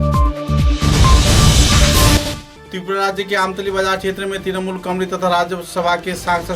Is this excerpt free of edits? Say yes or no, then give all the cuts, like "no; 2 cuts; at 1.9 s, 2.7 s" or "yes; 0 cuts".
no; 1 cut; at 2.2 s